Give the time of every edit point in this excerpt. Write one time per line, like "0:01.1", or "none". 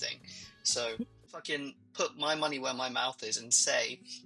0:01.2